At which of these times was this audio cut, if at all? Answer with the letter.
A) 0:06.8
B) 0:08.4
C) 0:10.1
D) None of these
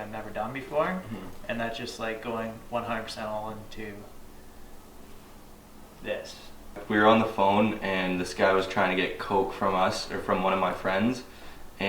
A